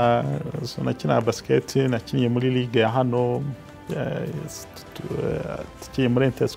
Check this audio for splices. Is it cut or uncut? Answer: uncut